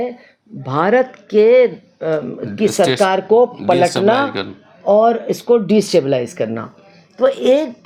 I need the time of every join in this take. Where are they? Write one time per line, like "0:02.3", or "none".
none